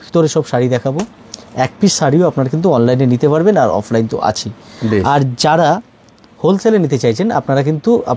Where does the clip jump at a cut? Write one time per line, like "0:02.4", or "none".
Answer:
none